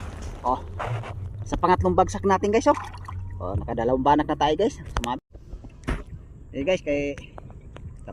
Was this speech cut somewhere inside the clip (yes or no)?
yes